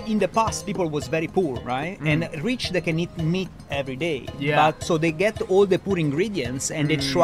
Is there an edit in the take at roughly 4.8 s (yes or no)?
yes